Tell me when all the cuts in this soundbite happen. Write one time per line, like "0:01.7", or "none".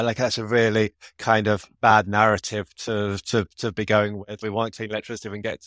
0:04.3